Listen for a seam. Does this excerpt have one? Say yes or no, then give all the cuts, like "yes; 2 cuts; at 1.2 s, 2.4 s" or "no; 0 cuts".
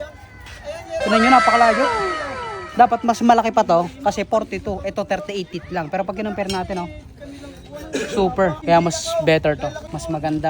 yes; 1 cut; at 8.6 s